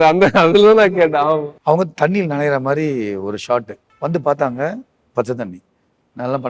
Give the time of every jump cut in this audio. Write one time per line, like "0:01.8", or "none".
0:01.5
0:03.8